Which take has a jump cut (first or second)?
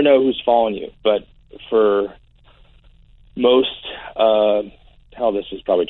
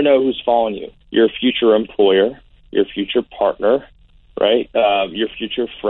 second